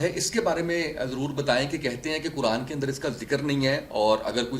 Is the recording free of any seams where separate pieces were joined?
yes; 0 cuts

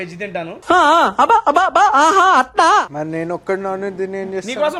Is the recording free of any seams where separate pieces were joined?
yes; 0 cuts

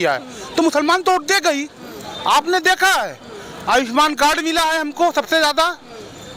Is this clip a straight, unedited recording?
yes; 0 cuts

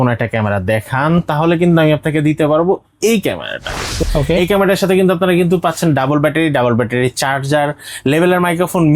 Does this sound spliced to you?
yes; 1 cut; at 4.0 s

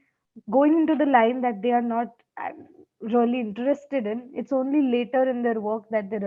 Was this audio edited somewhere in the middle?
no; 0 cuts

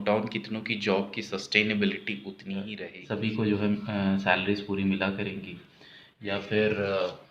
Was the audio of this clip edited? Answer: yes; 1 cut; at 2.9 s

